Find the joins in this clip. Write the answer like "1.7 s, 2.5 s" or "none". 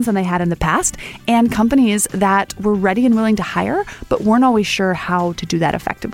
none